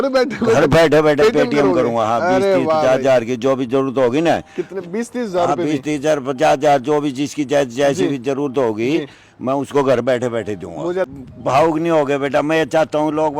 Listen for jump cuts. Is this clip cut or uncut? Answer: cut